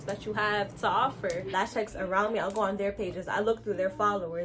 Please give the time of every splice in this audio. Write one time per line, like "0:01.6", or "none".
0:01.5